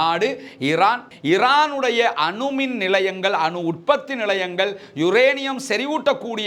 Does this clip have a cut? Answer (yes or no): yes